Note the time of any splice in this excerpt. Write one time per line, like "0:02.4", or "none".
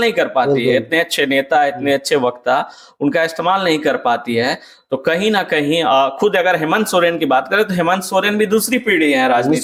none